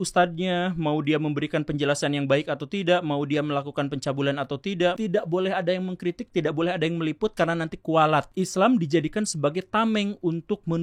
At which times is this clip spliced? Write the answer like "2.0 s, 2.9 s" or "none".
5.0 s, 8.3 s